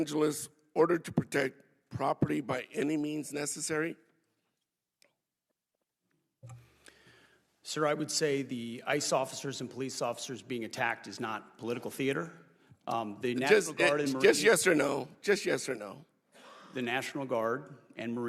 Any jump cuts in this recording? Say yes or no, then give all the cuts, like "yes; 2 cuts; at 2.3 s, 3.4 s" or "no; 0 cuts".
no; 0 cuts